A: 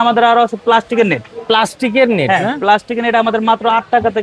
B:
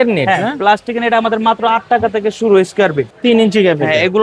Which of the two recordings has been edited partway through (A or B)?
B